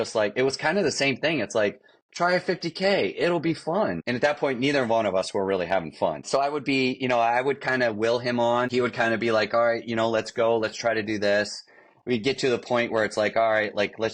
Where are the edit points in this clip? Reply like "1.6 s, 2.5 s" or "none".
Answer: 4.0 s, 6.2 s, 8.7 s